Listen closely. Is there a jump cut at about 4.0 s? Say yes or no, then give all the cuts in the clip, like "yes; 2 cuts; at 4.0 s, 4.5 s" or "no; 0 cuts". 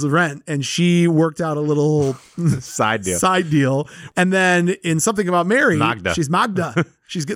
yes; 1 cut; at 4.0 s